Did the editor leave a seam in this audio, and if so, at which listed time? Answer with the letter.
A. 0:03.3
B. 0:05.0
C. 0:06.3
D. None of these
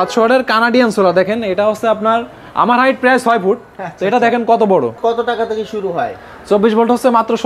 B